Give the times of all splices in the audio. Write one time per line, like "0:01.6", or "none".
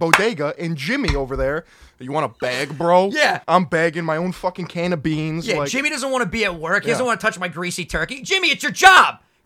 0:03.4